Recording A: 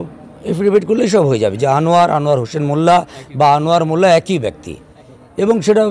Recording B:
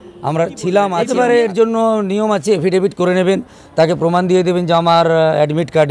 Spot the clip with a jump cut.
B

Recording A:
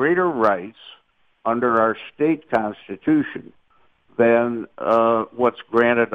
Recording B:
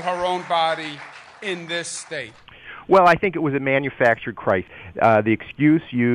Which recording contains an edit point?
B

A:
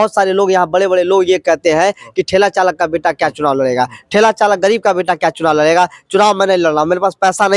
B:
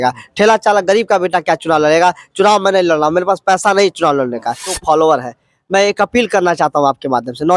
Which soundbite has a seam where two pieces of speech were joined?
B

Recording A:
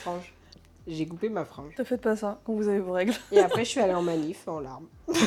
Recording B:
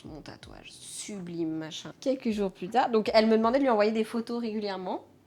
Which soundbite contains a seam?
B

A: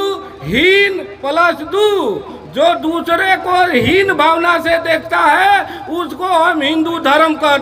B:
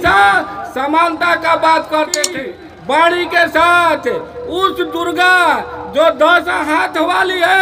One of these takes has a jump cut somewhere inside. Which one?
B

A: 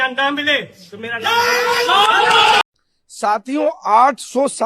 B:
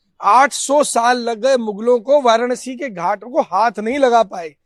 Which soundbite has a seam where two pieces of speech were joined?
A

